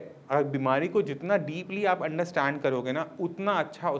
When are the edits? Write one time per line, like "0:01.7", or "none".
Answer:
none

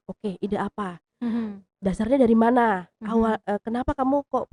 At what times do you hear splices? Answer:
none

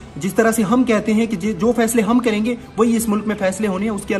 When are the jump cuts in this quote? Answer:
none

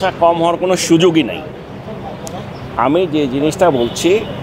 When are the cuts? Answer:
none

